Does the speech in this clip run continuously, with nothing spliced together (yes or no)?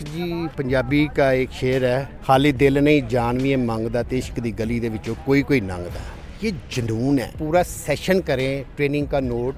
no